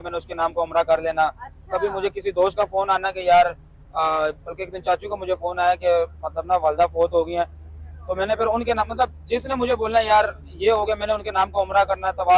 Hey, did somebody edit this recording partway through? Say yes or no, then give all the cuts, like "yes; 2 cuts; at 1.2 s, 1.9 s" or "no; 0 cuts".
no; 0 cuts